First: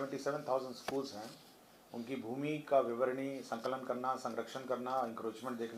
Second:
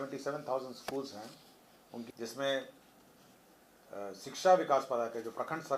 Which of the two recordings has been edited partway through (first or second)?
second